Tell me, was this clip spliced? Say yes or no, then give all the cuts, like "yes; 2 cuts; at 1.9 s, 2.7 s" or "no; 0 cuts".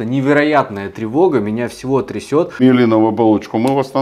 yes; 1 cut; at 2.6 s